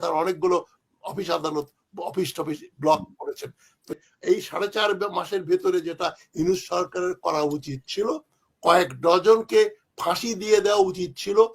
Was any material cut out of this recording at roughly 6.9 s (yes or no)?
no